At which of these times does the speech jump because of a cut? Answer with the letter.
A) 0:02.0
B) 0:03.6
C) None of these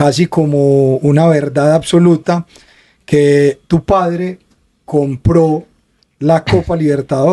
C